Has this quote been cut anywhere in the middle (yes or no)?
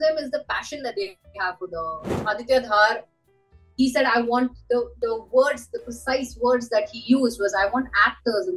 yes